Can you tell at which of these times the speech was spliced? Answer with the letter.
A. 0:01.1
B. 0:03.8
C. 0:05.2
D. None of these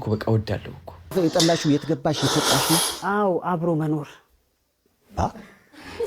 A